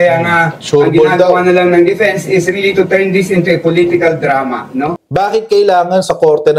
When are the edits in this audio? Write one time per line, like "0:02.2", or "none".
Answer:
0:05.0